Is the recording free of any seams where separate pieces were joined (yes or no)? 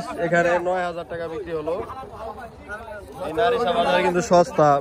yes